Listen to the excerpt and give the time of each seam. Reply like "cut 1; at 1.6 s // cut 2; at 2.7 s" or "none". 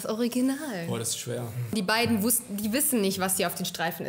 cut 1; at 1.7 s